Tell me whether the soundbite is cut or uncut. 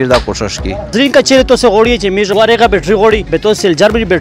cut